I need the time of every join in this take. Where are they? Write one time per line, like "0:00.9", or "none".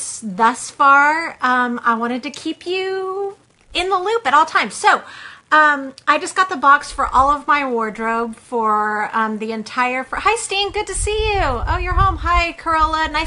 none